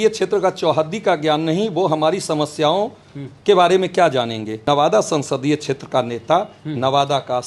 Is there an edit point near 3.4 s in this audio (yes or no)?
no